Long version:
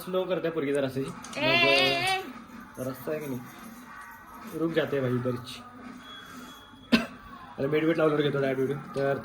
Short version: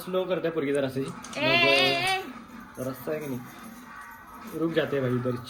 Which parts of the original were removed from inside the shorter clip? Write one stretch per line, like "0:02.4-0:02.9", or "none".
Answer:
none